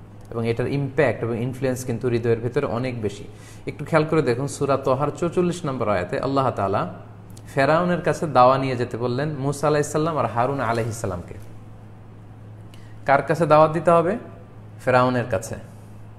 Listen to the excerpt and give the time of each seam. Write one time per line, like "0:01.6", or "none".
none